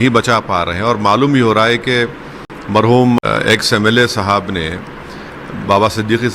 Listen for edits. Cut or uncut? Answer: cut